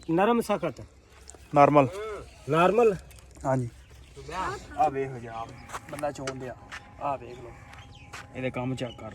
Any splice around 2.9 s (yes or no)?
no